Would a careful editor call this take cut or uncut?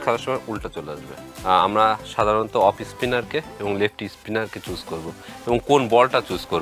cut